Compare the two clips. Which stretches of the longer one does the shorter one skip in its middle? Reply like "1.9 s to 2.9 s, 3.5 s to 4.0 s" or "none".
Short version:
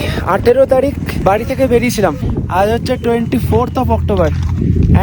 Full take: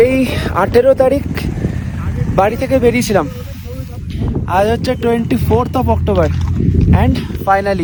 1.4 s to 2.3 s, 3.3 s to 4.2 s